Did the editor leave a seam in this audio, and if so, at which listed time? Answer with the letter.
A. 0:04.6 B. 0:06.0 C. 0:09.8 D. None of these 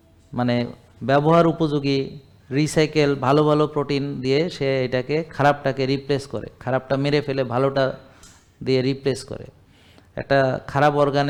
D